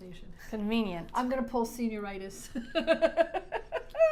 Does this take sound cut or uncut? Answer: uncut